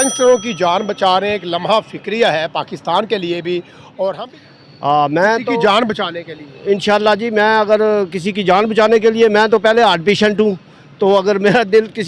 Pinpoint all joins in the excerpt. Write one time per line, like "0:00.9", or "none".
0:04.3